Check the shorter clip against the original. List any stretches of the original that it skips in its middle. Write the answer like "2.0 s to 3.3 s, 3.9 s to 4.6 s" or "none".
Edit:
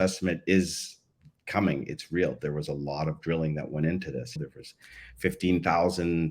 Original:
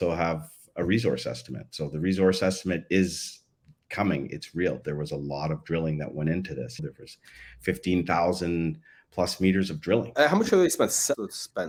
none